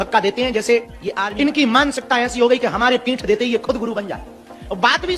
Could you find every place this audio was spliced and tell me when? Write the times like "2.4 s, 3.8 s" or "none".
1.0 s